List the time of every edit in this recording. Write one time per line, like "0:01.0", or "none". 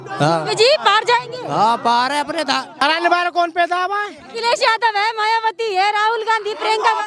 0:02.8